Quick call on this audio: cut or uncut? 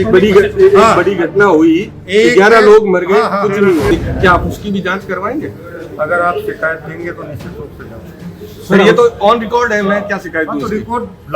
cut